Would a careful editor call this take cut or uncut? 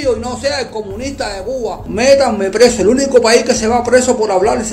cut